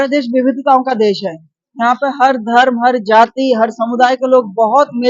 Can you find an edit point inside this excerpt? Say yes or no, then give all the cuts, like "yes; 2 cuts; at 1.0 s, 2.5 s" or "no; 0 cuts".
no; 0 cuts